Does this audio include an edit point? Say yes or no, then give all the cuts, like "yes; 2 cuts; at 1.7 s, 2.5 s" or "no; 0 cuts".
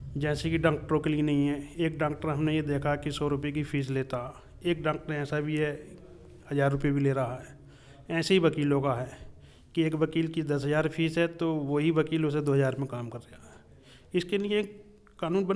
no; 0 cuts